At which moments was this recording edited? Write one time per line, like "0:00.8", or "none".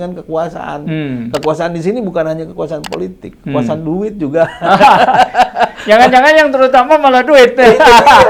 none